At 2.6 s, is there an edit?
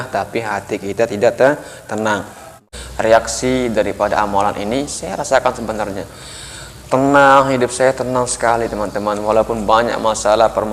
yes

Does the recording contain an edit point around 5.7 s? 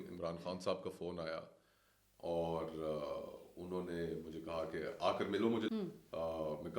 yes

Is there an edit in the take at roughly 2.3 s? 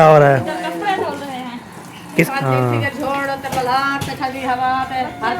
yes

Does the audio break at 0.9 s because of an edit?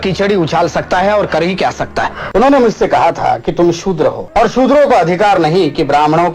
no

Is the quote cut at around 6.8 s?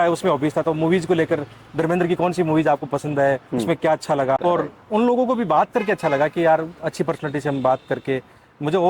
no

